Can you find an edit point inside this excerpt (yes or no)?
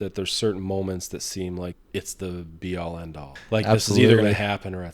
yes